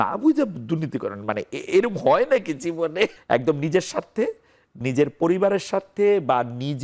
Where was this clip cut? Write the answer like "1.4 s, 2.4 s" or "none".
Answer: 3.2 s